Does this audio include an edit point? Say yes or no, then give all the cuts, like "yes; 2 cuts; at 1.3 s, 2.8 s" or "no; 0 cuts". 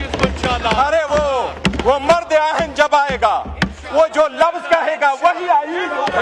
no; 0 cuts